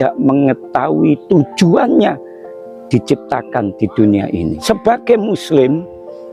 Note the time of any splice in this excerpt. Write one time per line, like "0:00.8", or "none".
0:04.6